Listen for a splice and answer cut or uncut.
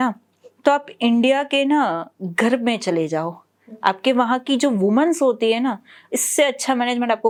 uncut